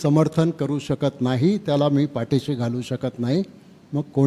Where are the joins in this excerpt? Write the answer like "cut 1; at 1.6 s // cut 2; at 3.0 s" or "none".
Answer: none